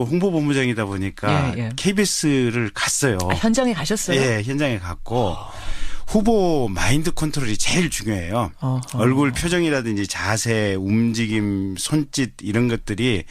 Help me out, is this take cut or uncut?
uncut